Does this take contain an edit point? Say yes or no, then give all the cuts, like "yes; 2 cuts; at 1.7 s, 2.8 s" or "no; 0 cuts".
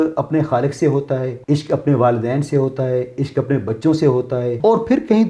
yes; 2 cuts; at 1.3 s, 4.5 s